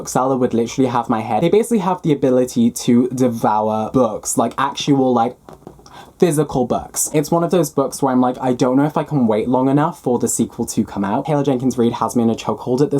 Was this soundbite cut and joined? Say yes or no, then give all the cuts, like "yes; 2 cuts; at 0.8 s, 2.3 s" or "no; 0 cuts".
yes; 3 cuts; at 1.4 s, 7.1 s, 11.2 s